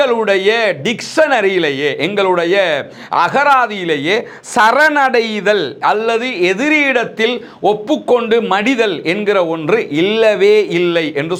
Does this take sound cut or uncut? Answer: uncut